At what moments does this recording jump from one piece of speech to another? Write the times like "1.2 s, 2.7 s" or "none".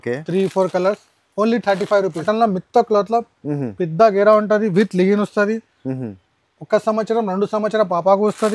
2.2 s